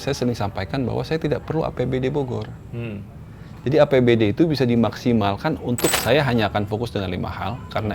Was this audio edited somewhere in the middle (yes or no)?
yes